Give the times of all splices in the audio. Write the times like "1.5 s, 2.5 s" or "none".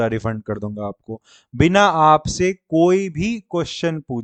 none